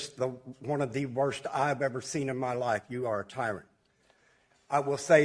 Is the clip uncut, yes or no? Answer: yes